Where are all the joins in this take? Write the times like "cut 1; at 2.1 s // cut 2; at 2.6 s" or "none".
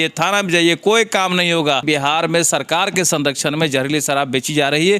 cut 1; at 1.8 s